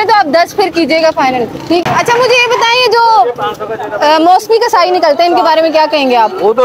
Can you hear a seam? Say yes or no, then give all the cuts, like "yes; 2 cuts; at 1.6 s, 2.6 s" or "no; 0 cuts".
yes; 1 cut; at 1.8 s